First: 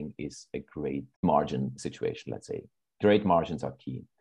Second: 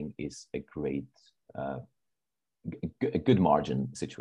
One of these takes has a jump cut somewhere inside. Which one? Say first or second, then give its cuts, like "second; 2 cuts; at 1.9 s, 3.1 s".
first; 1 cut; at 1.2 s